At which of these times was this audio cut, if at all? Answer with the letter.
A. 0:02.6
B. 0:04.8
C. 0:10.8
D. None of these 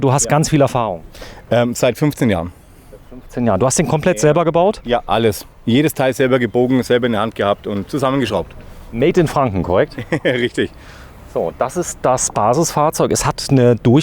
D